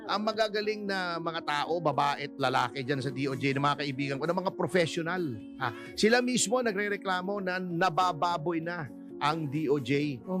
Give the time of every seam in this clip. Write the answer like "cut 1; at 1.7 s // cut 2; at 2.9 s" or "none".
none